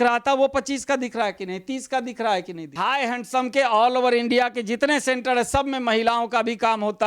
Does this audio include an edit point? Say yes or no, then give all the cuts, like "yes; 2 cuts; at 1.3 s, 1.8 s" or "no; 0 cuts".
yes; 1 cut; at 2.8 s